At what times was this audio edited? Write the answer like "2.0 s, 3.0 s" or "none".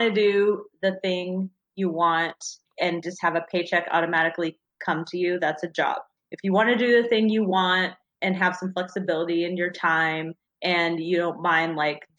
2.6 s